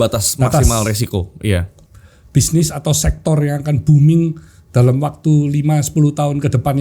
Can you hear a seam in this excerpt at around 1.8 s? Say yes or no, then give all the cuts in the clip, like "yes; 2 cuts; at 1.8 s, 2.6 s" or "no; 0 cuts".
yes; 1 cut; at 1.8 s